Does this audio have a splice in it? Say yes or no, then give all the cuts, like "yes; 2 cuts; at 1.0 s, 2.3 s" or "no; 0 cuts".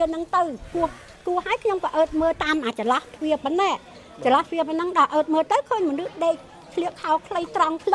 no; 0 cuts